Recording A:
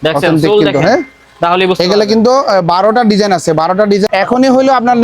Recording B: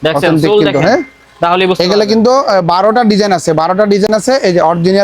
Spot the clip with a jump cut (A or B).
A